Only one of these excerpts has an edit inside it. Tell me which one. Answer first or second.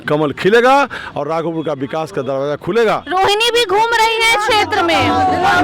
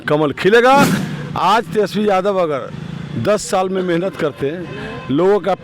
second